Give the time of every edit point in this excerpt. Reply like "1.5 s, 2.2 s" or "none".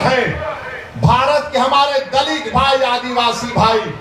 none